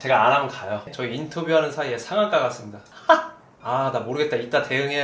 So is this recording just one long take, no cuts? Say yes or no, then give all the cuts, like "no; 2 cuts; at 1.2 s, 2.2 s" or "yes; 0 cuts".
no; 2 cuts; at 0.9 s, 3.6 s